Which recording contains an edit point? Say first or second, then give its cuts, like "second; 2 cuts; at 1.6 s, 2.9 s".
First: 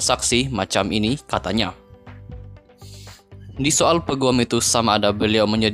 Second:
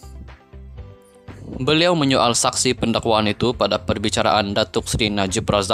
first; 2 cuts; at 1.7 s, 3.5 s